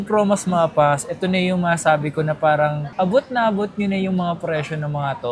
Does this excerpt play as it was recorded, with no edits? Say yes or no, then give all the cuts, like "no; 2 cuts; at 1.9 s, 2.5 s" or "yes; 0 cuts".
no; 1 cut; at 2.8 s